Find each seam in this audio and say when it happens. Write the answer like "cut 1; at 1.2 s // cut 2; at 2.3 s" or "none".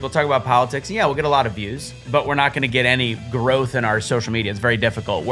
none